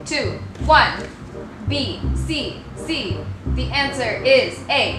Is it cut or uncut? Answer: uncut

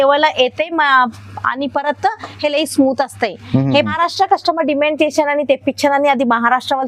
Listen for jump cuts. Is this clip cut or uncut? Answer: cut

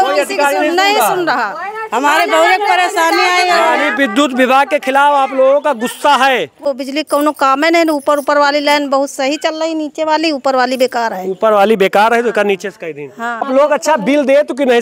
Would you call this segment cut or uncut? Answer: cut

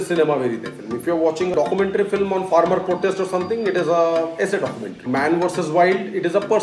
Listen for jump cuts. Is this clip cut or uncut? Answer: cut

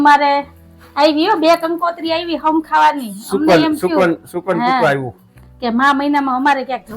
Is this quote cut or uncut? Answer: uncut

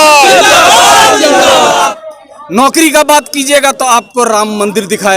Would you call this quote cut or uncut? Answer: cut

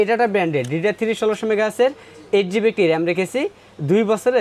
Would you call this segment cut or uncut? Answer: uncut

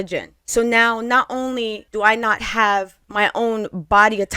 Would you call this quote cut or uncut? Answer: cut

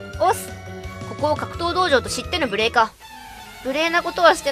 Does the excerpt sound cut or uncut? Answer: uncut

